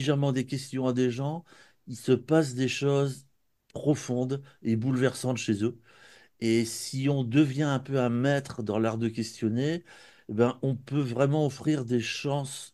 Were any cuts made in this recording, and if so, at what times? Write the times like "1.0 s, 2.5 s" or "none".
none